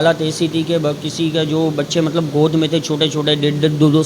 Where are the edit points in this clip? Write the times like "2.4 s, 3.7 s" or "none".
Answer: none